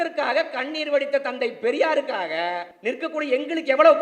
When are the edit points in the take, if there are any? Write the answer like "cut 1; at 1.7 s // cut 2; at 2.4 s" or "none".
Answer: cut 1; at 2.7 s